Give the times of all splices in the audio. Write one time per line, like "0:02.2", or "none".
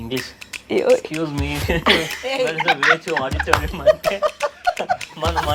none

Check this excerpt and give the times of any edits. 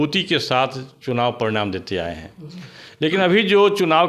none

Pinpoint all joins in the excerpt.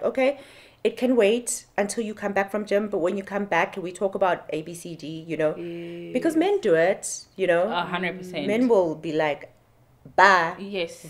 none

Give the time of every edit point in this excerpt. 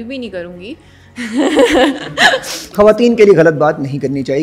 0:02.6

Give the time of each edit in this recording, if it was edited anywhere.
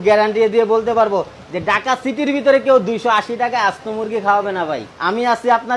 none

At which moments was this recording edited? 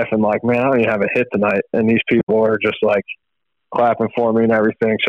none

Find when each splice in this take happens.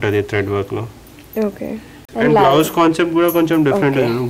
0:02.1

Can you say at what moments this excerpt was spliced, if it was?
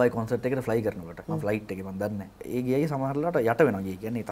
0:01.1
0:02.4

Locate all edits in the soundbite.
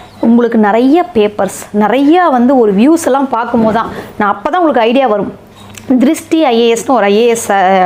none

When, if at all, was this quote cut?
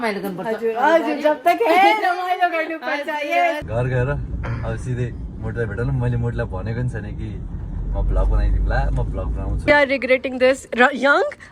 0:03.6
0:09.6

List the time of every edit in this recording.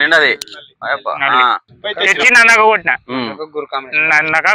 0:01.7

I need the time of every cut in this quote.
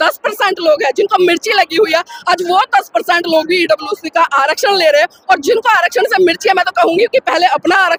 none

